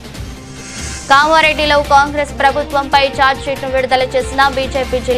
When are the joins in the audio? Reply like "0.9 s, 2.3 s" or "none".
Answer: 1.0 s